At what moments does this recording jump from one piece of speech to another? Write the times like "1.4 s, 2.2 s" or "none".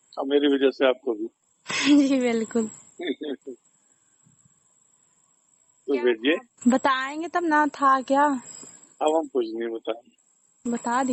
none